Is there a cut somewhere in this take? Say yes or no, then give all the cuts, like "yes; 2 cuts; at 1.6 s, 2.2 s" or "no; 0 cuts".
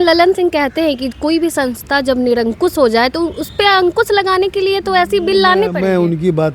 no; 0 cuts